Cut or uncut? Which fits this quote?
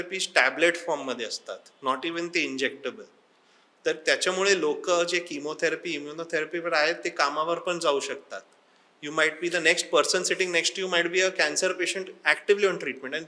uncut